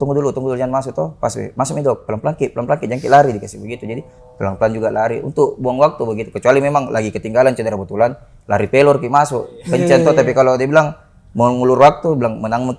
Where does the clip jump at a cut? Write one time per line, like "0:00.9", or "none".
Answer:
none

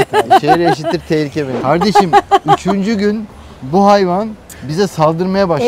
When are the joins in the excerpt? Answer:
0:01.6

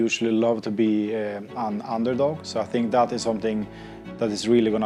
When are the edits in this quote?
none

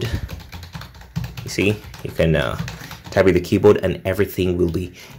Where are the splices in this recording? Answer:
none

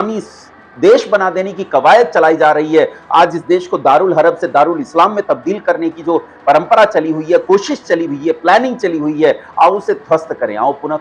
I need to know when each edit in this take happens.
none

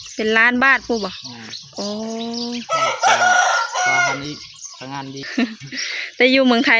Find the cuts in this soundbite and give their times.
0:05.2

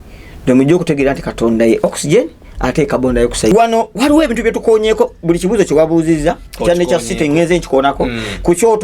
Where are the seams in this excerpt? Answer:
0:03.5

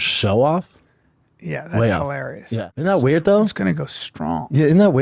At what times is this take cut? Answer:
0:02.7

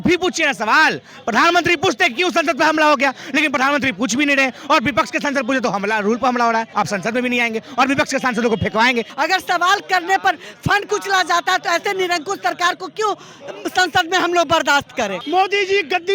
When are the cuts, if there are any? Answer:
0:06.7
0:09.1
0:15.2

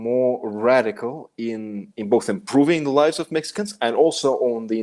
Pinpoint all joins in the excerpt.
none

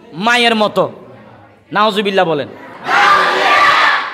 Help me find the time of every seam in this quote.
0:02.7

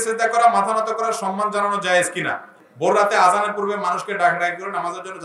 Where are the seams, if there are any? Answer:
0:02.6

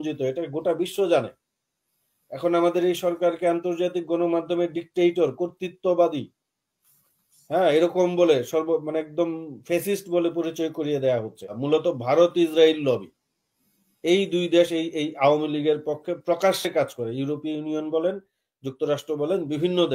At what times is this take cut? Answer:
0:11.5

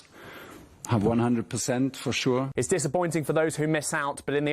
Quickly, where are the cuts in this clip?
0:02.5

